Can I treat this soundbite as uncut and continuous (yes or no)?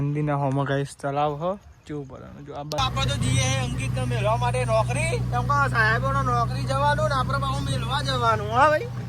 no